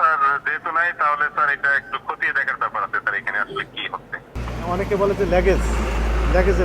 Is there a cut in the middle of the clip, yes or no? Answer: yes